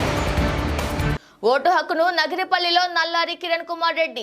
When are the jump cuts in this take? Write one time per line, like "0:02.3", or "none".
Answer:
0:01.2